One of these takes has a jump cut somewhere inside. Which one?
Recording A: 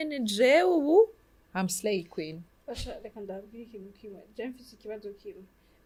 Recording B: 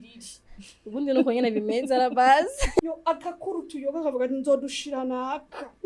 B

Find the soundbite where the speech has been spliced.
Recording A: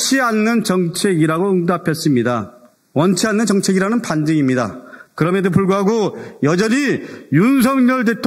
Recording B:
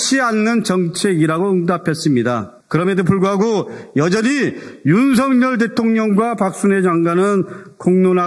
B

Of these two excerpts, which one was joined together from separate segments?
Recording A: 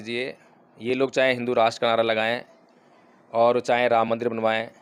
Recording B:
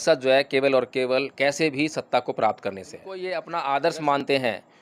B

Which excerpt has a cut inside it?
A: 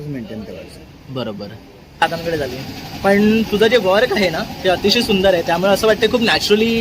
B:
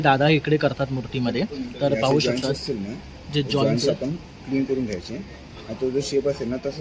A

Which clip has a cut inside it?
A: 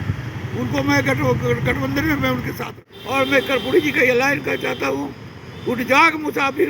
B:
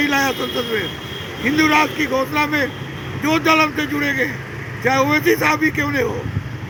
A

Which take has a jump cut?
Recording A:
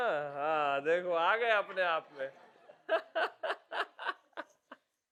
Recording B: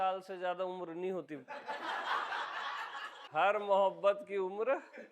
B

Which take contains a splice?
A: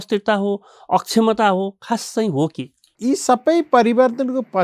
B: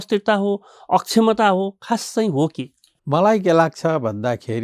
A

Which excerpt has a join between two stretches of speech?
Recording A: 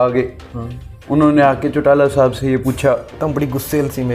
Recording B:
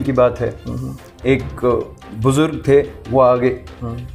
A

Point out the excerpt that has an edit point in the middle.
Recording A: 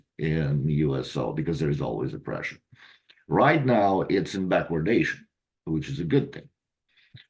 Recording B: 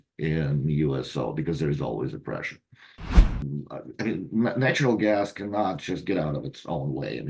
B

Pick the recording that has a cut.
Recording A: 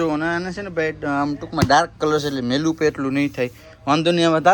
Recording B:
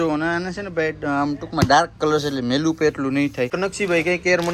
B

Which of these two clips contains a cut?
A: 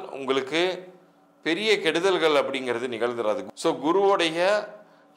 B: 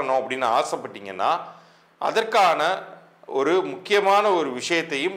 A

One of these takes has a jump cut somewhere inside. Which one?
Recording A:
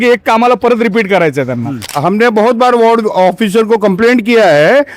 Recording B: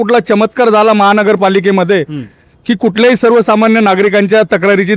A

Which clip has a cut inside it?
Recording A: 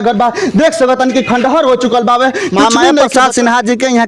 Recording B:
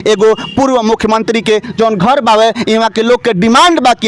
A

